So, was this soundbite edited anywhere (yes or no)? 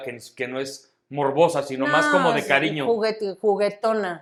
no